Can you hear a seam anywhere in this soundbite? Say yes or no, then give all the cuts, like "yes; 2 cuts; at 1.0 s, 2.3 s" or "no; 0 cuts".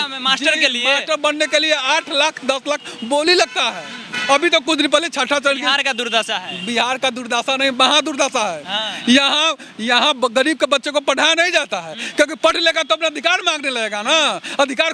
no; 0 cuts